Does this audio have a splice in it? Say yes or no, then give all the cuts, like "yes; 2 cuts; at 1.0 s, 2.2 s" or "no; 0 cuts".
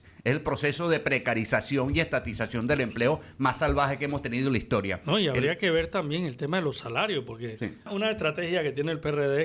yes; 1 cut; at 7.9 s